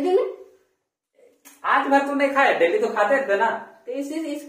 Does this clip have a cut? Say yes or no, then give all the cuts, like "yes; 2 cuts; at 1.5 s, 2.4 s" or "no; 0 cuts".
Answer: no; 0 cuts